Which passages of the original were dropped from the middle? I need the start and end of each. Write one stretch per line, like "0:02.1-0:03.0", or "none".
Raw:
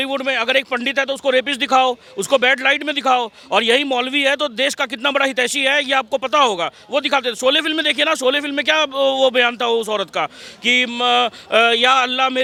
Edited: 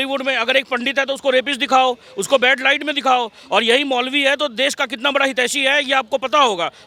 none